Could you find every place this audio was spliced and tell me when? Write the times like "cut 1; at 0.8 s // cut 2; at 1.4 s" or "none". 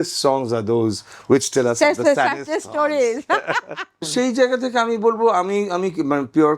cut 1; at 4.0 s

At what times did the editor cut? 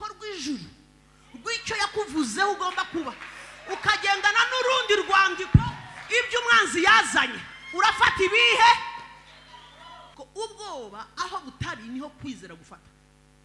cut 1; at 10.0 s

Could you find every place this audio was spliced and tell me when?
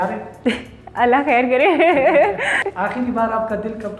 cut 1; at 2.7 s

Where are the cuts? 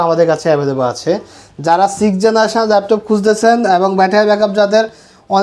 none

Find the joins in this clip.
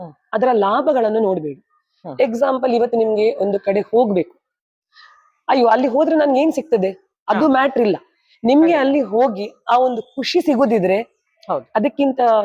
none

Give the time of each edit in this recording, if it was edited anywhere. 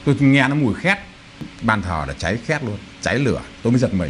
cut 1; at 1.4 s

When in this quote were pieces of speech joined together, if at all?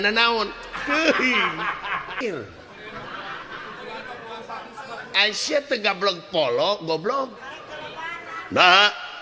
cut 1; at 2.2 s

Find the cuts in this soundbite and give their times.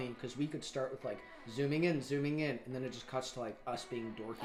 none

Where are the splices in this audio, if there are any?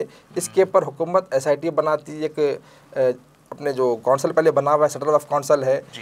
none

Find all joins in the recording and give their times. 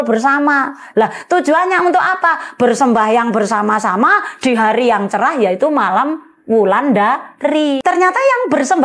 cut 1; at 7.8 s

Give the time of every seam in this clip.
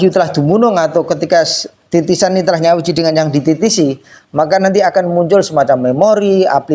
none

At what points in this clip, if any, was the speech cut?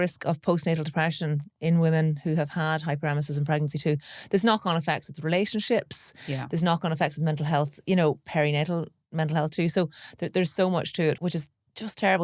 cut 1; at 11.2 s

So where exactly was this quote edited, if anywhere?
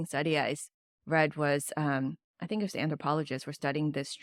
none

